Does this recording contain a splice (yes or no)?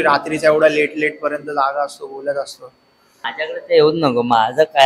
yes